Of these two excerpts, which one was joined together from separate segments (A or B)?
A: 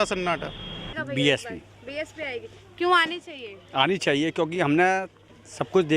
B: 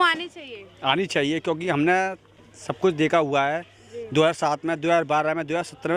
A